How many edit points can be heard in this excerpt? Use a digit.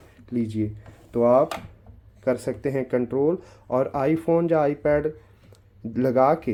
0